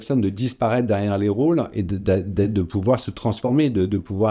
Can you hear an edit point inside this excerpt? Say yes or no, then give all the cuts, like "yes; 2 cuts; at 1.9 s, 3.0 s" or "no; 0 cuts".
no; 0 cuts